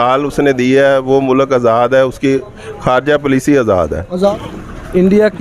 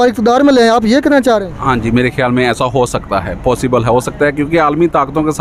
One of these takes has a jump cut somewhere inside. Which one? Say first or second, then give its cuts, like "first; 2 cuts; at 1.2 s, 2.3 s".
first; 1 cut; at 4.3 s